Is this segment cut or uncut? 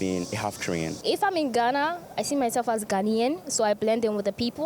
cut